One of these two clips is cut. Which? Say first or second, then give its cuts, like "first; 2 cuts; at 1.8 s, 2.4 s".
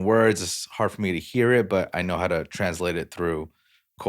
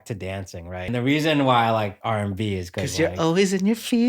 second; 2 cuts; at 0.9 s, 2.0 s